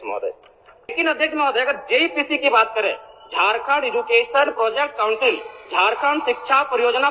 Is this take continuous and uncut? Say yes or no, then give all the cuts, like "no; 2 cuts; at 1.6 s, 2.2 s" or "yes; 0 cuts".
no; 1 cut; at 0.9 s